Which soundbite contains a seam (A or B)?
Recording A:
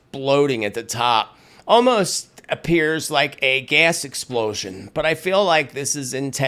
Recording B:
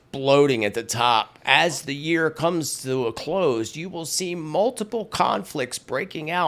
B